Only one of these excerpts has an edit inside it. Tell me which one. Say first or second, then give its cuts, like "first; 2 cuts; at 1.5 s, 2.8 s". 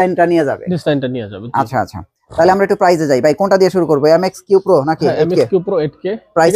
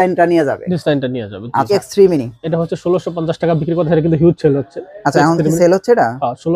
second; 1 cut; at 1.7 s